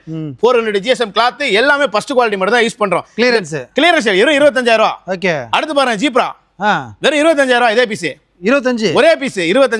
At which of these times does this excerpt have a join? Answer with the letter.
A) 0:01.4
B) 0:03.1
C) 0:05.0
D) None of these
D